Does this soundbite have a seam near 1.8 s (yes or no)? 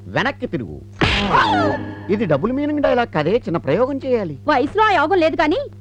no